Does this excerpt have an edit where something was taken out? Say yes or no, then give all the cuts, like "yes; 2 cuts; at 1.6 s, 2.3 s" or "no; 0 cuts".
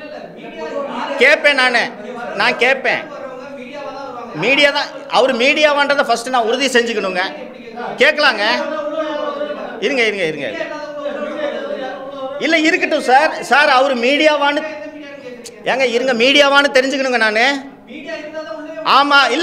no; 0 cuts